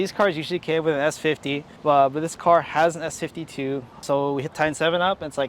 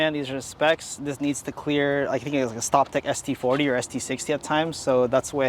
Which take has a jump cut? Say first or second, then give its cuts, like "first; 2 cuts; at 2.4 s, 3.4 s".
first; 1 cut; at 4.0 s